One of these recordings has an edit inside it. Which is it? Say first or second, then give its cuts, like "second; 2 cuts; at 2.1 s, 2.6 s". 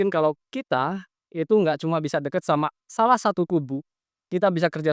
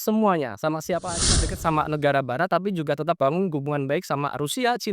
second; 1 cut; at 1.5 s